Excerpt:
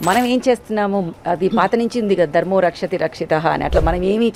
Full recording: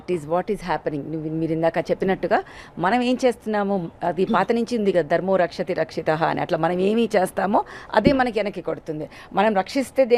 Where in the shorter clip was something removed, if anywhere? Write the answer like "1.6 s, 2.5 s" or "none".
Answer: none